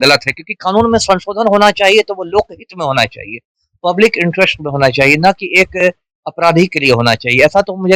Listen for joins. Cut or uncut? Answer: uncut